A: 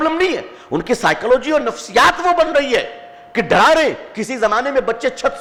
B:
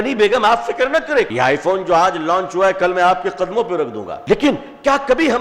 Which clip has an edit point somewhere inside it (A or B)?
B